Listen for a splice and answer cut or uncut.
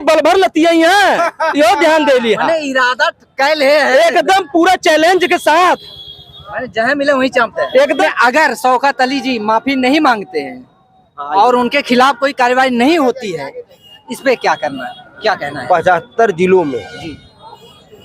cut